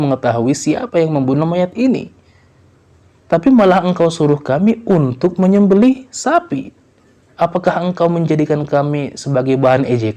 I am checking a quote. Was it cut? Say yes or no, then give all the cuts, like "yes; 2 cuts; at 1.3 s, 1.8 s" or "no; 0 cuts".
no; 0 cuts